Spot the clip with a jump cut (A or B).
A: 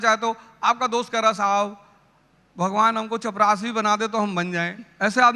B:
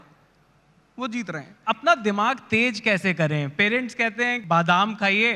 B